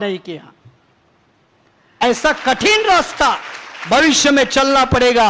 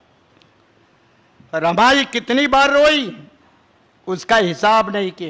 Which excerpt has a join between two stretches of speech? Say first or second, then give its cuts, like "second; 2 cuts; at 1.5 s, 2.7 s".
first; 1 cut; at 2.0 s